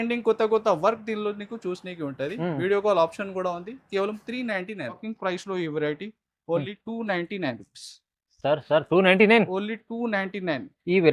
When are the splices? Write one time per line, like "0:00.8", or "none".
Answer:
0:05.0